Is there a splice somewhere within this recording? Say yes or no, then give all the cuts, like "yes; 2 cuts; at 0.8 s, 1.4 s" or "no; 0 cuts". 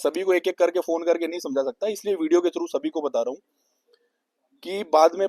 no; 0 cuts